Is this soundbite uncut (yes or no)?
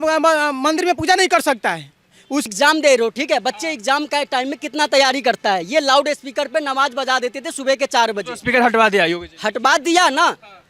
no